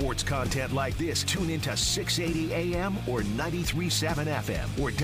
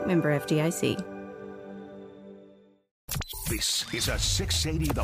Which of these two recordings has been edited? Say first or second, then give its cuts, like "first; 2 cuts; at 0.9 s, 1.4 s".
second; 1 cut; at 3.1 s